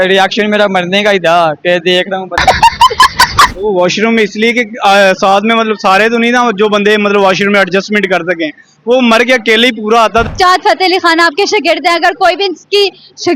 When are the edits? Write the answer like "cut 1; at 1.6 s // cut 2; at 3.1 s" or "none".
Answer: cut 1; at 3.6 s // cut 2; at 10.3 s